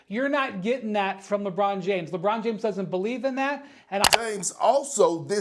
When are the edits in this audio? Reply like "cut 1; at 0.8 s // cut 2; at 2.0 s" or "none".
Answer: cut 1; at 4.0 s